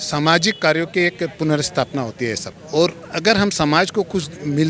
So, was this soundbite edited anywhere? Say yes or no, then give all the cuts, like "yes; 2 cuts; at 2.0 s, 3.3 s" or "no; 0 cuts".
no; 0 cuts